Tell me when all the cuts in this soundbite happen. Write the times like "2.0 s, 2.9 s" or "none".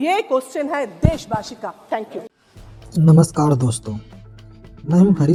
none